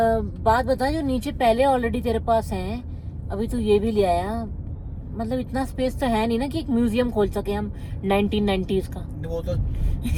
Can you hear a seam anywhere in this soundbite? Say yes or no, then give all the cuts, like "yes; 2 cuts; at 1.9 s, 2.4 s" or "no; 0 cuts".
no; 0 cuts